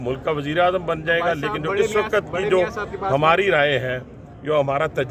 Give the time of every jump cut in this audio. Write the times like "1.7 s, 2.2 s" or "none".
none